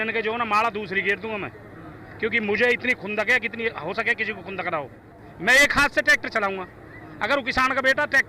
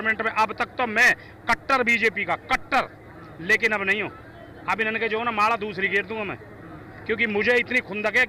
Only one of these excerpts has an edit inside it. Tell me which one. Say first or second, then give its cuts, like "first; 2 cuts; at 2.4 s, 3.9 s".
first; 1 cut; at 5.2 s